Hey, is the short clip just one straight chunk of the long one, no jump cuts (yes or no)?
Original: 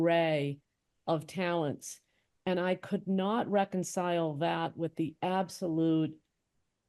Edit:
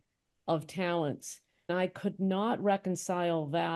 no